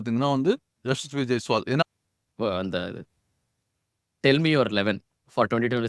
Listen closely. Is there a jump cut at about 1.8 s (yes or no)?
yes